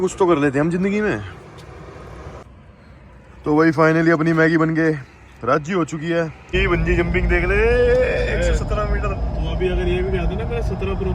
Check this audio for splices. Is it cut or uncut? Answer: cut